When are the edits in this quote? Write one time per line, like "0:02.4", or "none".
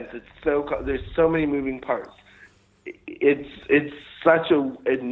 none